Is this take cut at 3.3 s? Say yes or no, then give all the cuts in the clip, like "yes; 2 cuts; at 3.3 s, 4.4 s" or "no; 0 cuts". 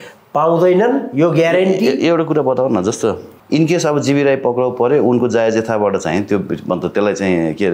yes; 1 cut; at 3.3 s